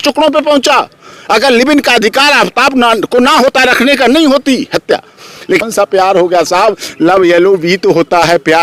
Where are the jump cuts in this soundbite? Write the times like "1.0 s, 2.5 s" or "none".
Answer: 5.6 s